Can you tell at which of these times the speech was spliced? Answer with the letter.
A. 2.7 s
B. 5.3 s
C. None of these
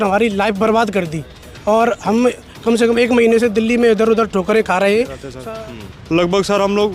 B